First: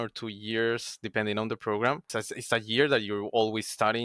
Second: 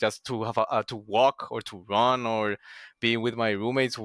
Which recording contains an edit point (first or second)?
first